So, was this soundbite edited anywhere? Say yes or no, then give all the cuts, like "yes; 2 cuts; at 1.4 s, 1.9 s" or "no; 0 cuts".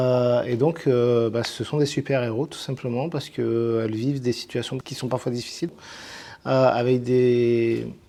no; 0 cuts